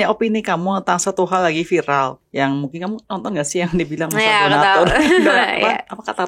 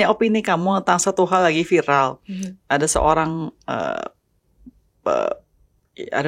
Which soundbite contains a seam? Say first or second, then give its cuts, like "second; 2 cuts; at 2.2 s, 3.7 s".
first; 1 cut; at 2.2 s